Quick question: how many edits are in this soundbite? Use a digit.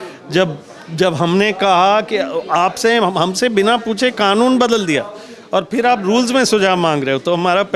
0